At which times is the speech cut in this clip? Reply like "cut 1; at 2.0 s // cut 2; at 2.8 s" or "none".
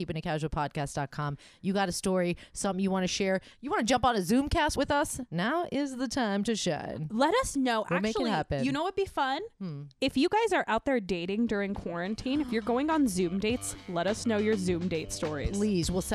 none